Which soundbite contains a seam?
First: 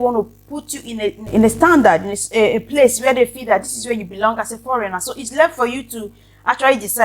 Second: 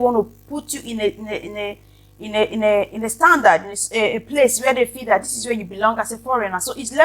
first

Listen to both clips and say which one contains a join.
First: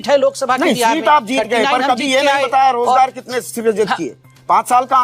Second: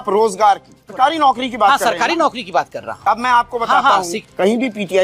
second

